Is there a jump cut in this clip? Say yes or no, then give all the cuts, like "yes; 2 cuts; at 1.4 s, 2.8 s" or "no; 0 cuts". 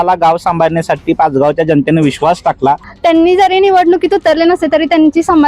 yes; 1 cut; at 2.9 s